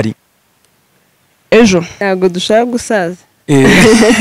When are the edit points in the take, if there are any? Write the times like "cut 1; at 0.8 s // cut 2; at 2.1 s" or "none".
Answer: cut 1; at 2.0 s